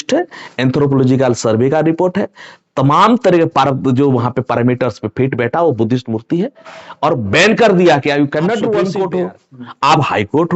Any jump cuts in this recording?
yes; 1 cut; at 8.9 s

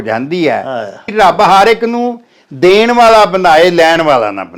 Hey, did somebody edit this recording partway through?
yes; 1 cut; at 1.1 s

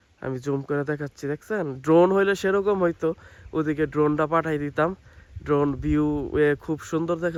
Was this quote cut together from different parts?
no; 0 cuts

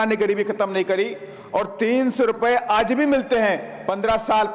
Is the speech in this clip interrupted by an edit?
no; 0 cuts

